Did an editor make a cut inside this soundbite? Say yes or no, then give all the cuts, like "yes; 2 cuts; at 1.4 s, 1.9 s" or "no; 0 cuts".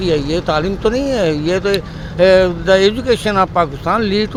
no; 0 cuts